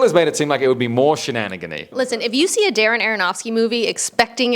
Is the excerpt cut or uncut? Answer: cut